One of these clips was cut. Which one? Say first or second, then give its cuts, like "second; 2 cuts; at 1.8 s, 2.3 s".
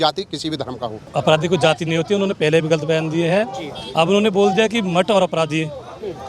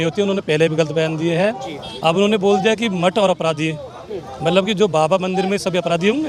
first; 1 cut; at 1.0 s